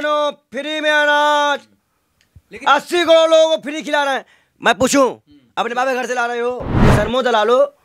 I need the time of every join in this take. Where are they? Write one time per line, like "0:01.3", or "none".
0:06.7